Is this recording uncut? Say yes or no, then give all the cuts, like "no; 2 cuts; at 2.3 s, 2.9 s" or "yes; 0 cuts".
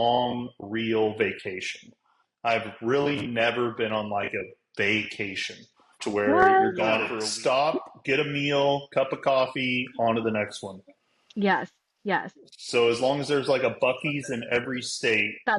no; 1 cut; at 7.1 s